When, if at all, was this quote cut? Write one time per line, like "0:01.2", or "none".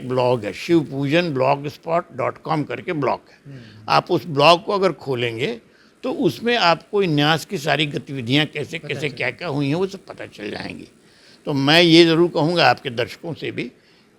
none